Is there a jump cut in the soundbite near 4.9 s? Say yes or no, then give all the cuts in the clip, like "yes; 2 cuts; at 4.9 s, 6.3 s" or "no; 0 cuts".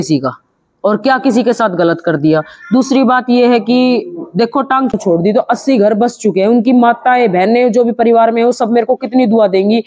yes; 1 cut; at 4.9 s